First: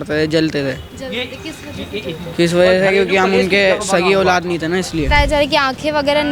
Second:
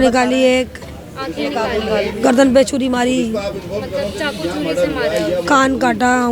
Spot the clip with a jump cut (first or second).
first